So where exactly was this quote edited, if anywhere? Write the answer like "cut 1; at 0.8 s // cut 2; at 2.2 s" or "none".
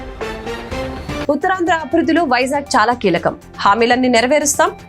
cut 1; at 1.2 s